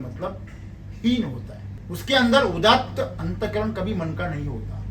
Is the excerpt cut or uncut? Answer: uncut